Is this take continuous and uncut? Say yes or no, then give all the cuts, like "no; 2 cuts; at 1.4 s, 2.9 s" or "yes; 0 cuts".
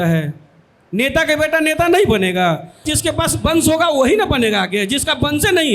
no; 1 cut; at 2.9 s